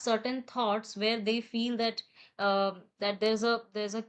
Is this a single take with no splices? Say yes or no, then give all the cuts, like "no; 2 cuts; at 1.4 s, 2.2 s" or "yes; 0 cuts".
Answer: yes; 0 cuts